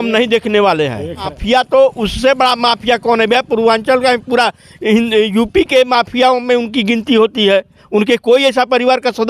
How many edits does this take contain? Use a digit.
1